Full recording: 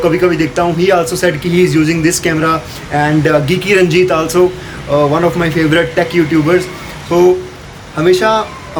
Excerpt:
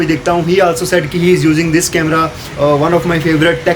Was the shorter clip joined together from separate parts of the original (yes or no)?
yes